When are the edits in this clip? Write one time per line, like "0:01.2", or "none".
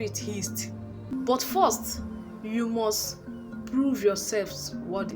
0:01.1

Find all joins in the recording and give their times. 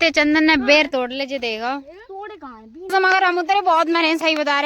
0:02.9

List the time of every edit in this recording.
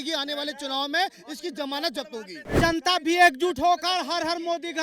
0:02.6

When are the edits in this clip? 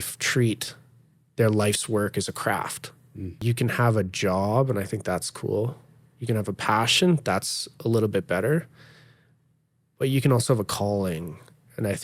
0:03.4

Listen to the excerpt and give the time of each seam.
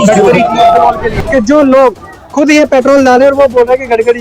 0:01.1

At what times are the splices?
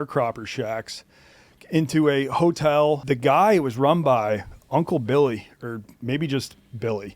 0:03.0

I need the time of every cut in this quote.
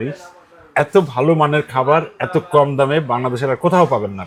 none

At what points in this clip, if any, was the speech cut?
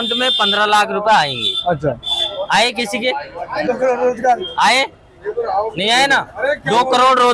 none

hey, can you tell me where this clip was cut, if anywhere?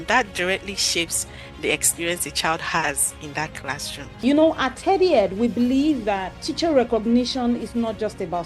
0:04.2
0:06.4

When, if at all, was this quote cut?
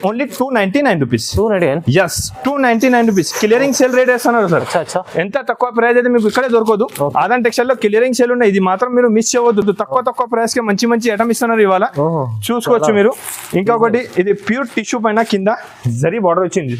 none

